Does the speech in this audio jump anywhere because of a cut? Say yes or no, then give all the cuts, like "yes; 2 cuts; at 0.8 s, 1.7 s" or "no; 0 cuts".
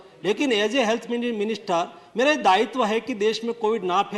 no; 0 cuts